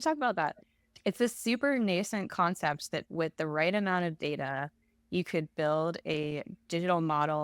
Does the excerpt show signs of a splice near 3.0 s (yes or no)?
yes